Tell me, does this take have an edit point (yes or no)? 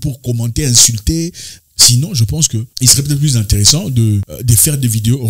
no